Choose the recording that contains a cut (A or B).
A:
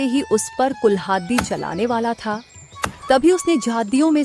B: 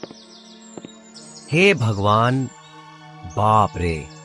B